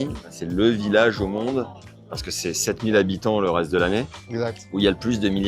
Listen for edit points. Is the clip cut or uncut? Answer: uncut